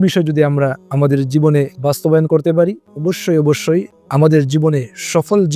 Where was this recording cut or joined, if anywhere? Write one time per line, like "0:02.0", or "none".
0:02.9
0:03.9